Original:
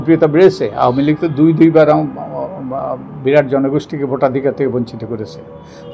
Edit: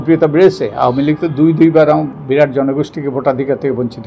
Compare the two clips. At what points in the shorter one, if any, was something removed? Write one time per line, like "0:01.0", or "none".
0:02.2